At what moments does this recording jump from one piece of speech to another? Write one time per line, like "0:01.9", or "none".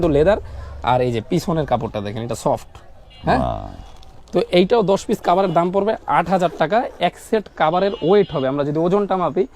none